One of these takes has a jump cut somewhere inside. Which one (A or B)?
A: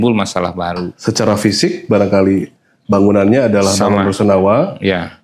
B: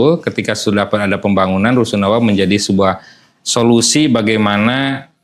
A